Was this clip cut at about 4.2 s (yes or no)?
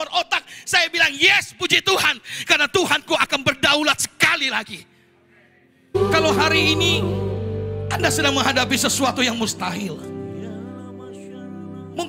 no